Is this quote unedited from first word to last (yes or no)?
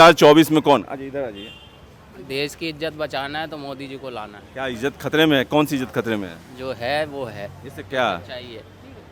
yes